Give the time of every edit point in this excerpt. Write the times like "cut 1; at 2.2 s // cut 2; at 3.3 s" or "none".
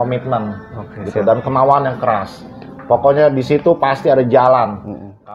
none